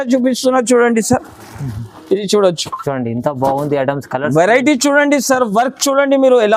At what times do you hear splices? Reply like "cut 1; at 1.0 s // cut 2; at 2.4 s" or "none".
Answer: none